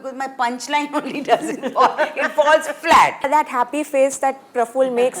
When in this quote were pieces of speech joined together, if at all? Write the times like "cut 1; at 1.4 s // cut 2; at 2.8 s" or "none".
cut 1; at 3.3 s